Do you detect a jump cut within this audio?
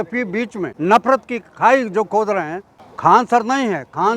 yes; 2 cuts; at 1.0 s, 3.2 s

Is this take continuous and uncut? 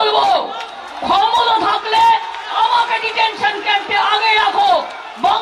yes; 0 cuts

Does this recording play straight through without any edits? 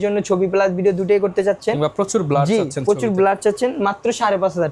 yes; 0 cuts

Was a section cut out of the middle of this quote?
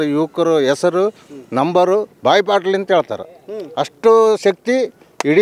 yes; 1 cut; at 2.1 s

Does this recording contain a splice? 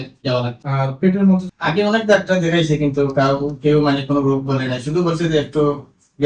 yes; 1 cut; at 1.5 s

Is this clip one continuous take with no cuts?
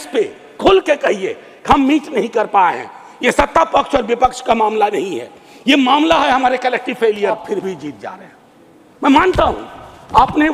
no; 1 cut; at 7.4 s

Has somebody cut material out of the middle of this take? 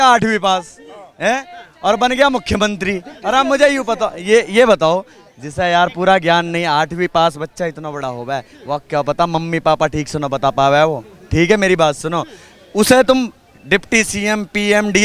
no; 0 cuts

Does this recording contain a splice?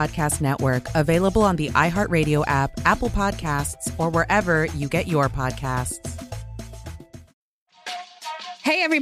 no; 0 cuts

